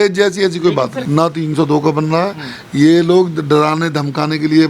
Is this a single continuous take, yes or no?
no